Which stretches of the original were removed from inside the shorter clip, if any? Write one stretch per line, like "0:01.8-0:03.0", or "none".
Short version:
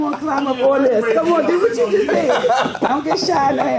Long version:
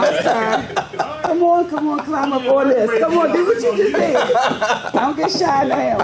0:04.6-0:04.8